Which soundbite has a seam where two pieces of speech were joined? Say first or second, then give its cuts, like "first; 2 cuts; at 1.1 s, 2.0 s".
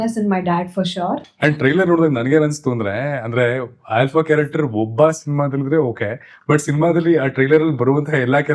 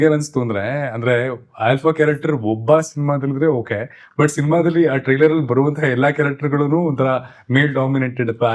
first; 1 cut; at 1.2 s